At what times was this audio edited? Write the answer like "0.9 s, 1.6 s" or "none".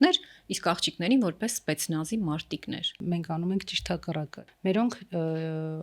3.0 s, 4.4 s